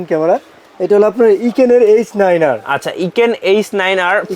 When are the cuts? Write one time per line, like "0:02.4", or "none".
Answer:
none